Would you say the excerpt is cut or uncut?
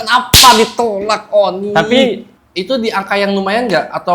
cut